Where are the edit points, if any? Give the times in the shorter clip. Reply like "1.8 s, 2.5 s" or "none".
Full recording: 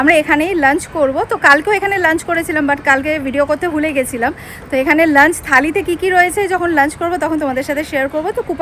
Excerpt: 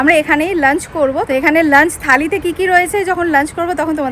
1.3 s